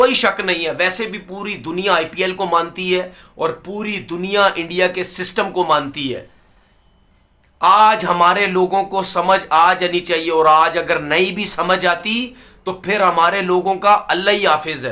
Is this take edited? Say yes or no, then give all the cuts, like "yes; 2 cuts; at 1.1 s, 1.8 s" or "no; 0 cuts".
no; 0 cuts